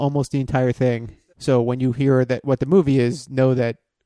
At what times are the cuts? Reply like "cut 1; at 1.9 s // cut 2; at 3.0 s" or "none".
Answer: cut 1; at 0.9 s